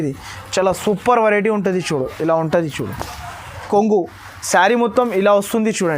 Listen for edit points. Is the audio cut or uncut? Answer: cut